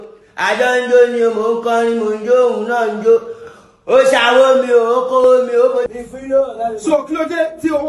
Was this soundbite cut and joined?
yes; 1 cut; at 5.9 s

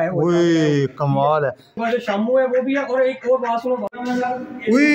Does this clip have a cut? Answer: yes; 2 cuts; at 1.7 s, 3.9 s

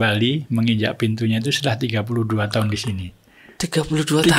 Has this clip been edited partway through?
no; 0 cuts

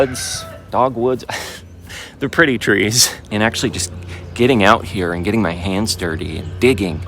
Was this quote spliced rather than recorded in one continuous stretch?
yes; 1 cut; at 3.3 s

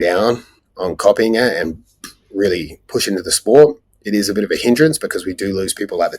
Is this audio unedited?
yes; 0 cuts

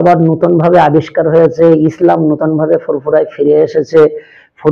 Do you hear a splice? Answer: no; 0 cuts

